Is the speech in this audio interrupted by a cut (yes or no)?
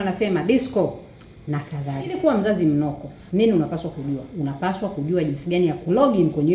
yes